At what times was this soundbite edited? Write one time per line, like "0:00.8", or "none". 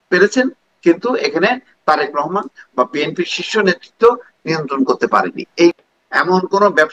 0:05.8